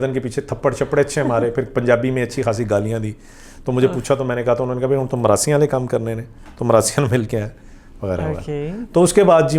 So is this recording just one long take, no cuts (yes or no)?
yes